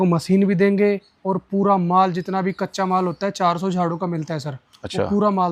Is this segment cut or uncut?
uncut